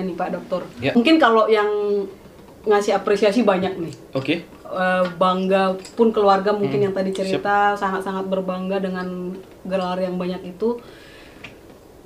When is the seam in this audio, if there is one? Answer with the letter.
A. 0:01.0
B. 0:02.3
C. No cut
A